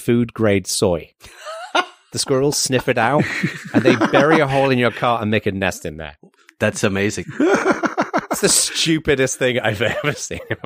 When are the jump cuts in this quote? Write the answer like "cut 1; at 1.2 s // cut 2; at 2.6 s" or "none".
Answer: none